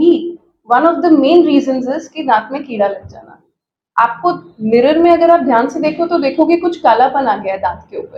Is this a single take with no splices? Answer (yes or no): yes